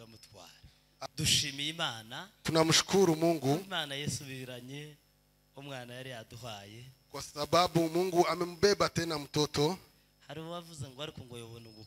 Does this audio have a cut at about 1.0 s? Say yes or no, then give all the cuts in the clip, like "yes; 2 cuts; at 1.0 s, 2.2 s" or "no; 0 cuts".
yes; 1 cut; at 1.0 s